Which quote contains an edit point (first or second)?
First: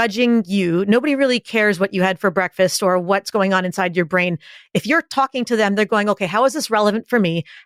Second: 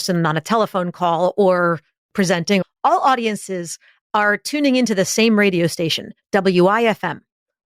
second